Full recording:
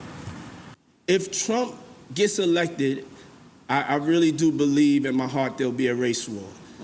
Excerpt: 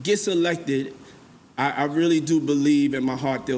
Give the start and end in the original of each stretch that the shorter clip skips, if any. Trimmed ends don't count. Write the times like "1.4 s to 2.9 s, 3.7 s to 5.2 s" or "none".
none